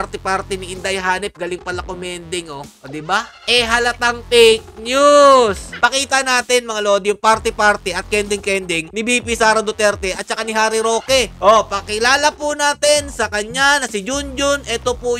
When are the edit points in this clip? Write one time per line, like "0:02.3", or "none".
0:03.4
0:05.7

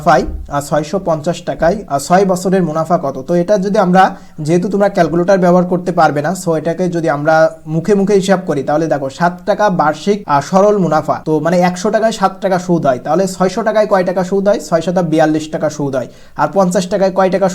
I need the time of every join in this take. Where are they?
0:01.8
0:10.2
0:11.2

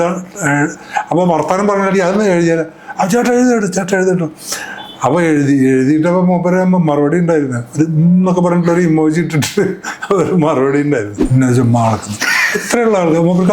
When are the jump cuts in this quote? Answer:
0:11.2

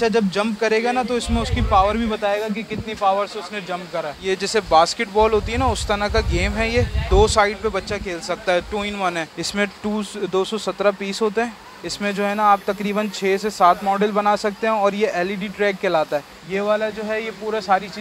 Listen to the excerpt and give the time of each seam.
0:04.2
0:09.4
0:16.4

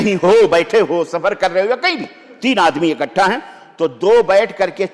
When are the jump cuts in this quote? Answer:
none

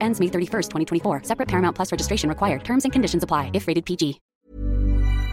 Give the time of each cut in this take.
0:04.3

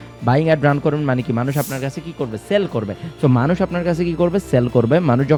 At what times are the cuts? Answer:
none

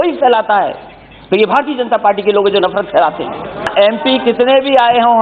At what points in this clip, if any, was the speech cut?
0:03.7

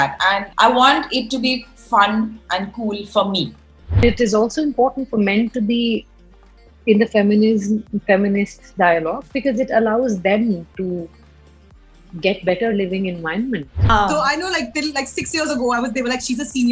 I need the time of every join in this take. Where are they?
0:04.0
0:13.9

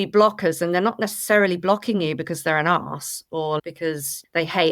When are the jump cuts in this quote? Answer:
0:03.6

